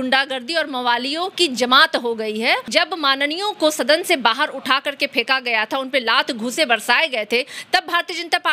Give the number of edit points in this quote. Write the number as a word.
one